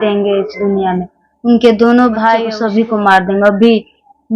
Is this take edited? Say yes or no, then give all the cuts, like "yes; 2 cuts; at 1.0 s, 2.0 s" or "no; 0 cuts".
yes; 1 cut; at 2.6 s